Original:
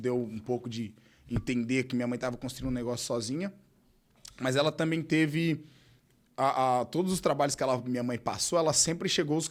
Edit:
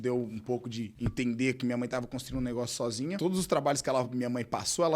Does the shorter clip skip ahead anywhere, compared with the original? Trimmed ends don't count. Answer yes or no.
yes